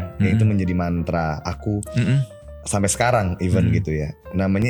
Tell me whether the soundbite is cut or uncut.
uncut